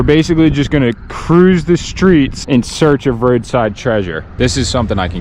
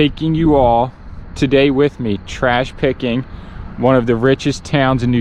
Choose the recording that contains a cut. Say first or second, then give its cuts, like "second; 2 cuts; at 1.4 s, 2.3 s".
first; 2 cuts; at 2.4 s, 4.2 s